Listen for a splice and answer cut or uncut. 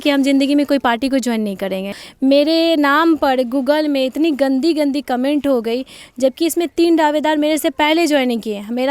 cut